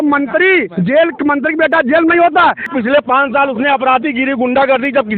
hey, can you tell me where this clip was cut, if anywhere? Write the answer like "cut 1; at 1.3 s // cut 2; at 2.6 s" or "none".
cut 1; at 2.7 s